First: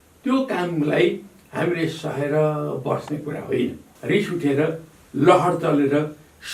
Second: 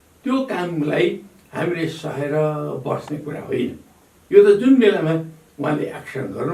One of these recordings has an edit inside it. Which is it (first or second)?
first